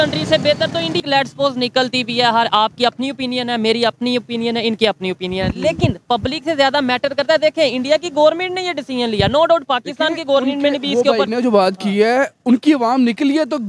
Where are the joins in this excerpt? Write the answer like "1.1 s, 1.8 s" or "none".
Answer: 1.0 s